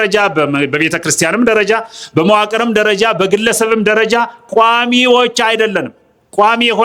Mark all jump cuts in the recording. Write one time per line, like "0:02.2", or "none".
none